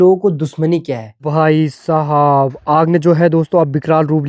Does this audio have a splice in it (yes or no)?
yes